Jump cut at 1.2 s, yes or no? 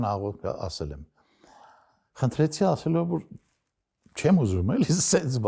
no